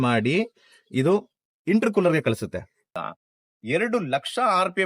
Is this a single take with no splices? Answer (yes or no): no